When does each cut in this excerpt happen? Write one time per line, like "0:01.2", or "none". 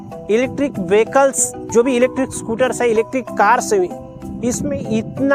none